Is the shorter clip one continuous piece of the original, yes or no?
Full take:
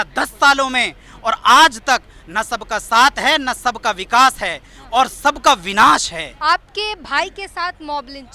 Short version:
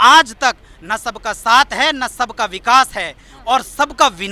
yes